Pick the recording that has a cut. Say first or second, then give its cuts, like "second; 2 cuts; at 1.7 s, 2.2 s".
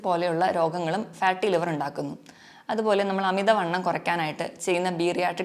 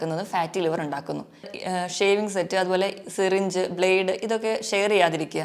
second; 1 cut; at 1.5 s